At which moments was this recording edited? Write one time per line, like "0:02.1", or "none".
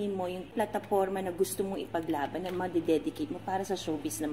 none